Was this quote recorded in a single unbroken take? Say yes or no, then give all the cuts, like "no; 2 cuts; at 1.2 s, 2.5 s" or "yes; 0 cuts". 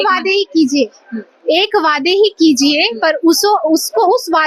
yes; 0 cuts